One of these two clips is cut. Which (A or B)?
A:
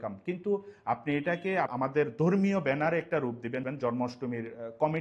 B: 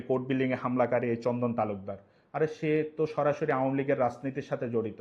A